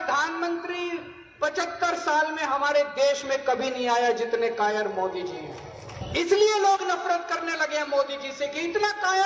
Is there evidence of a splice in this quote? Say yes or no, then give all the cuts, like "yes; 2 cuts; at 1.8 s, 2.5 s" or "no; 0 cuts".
yes; 1 cut; at 5.9 s